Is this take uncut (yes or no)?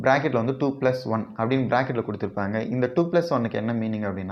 yes